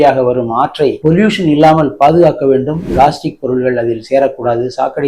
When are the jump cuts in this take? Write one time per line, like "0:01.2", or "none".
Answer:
0:02.9